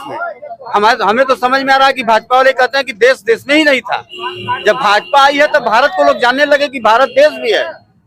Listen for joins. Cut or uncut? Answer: uncut